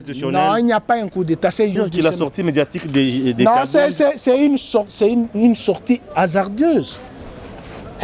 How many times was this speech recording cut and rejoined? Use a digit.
1